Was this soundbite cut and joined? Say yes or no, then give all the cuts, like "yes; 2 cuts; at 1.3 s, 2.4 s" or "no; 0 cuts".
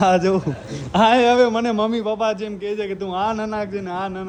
no; 0 cuts